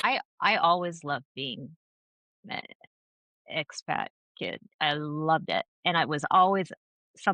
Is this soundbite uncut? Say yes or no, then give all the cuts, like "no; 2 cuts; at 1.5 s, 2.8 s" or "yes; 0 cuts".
yes; 0 cuts